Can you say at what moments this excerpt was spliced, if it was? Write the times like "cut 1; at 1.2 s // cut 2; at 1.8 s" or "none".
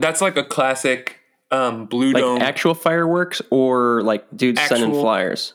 none